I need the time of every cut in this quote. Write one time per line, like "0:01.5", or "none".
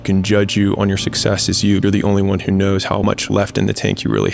0:01.8
0:03.1